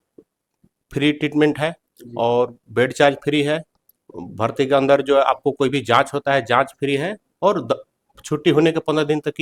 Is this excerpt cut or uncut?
uncut